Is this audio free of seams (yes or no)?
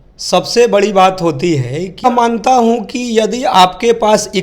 no